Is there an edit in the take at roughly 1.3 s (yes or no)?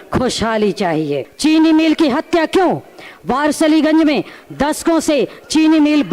yes